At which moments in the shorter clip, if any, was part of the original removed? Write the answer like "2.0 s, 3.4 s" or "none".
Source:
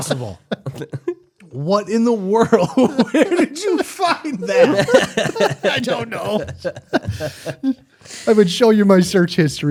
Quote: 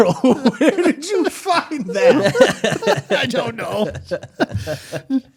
none